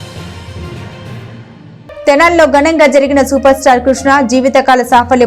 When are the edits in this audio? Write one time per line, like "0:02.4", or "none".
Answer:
0:01.9